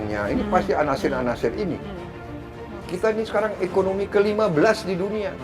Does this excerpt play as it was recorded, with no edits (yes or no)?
no